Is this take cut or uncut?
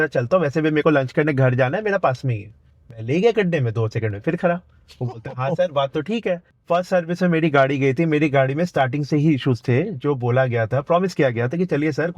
cut